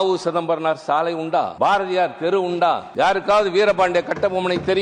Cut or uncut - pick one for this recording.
cut